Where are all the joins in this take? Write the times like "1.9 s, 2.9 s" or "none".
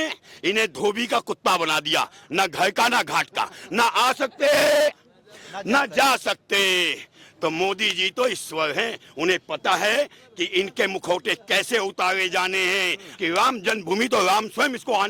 13.0 s